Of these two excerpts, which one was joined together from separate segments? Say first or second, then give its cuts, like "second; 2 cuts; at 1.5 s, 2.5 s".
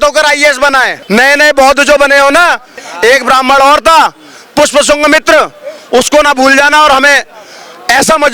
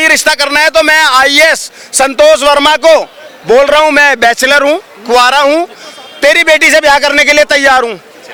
first; 2 cuts; at 0.9 s, 2.8 s